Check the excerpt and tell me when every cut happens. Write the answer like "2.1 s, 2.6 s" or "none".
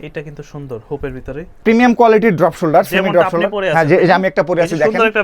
1.6 s